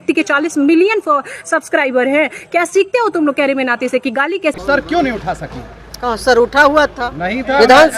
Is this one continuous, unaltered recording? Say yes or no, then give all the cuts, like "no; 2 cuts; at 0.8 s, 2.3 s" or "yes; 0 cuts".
no; 1 cut; at 4.5 s